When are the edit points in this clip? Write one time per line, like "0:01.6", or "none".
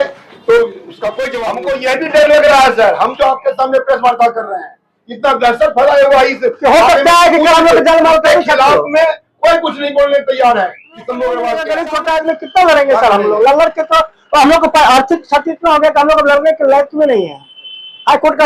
0:01.4
0:11.8